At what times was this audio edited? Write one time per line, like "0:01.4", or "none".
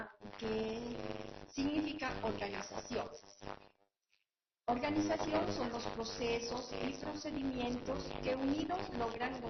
none